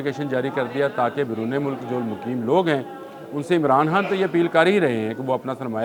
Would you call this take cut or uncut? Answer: uncut